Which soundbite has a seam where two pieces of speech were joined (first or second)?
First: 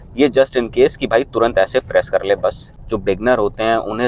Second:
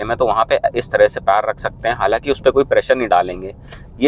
first